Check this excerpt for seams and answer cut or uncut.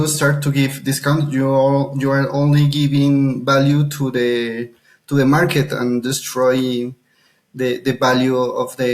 uncut